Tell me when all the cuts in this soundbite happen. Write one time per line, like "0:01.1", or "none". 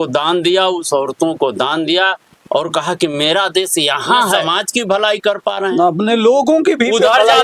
0:04.5